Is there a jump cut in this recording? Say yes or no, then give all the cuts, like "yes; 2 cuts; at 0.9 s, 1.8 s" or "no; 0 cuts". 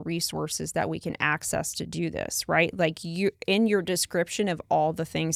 no; 0 cuts